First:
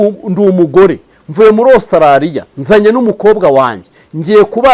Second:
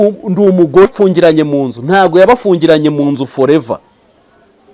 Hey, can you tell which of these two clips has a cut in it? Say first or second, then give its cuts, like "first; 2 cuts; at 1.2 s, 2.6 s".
second; 1 cut; at 0.9 s